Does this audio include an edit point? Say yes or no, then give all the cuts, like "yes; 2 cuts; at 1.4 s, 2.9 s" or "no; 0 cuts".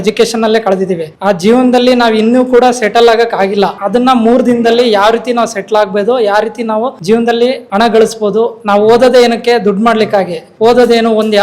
yes; 2 cuts; at 1.1 s, 3.8 s